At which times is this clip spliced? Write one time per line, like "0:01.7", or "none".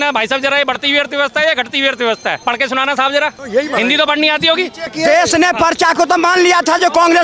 0:02.4
0:03.4
0:04.9